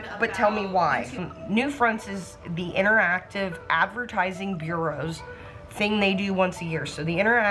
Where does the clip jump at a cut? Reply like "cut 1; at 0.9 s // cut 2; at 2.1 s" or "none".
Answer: cut 1; at 1.2 s

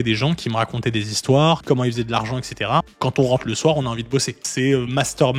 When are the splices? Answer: cut 1; at 1.6 s // cut 2; at 2.9 s // cut 3; at 4.4 s

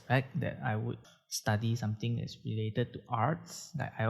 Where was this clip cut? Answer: cut 1; at 1.1 s

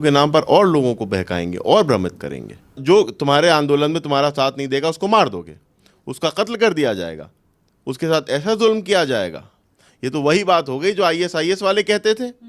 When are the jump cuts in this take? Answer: cut 1; at 2.8 s

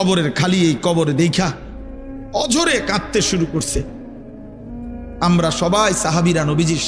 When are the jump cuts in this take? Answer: cut 1; at 3.9 s // cut 2; at 5.2 s

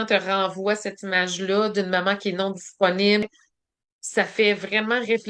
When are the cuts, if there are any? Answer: cut 1; at 3.3 s

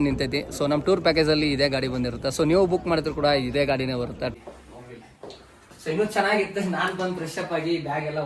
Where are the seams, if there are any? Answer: cut 1; at 4.3 s

